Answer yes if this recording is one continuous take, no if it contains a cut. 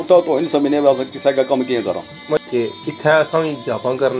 no